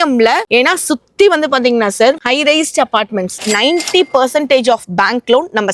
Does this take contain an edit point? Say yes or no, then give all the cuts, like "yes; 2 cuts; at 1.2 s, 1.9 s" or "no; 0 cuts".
yes; 1 cut; at 3.4 s